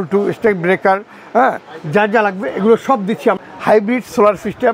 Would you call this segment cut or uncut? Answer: cut